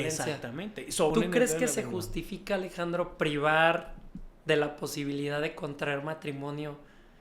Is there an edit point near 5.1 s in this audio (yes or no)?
no